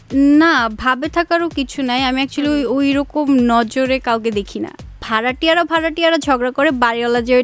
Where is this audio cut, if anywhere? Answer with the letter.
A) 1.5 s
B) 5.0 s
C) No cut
B